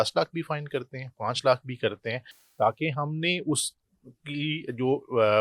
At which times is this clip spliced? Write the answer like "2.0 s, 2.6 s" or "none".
none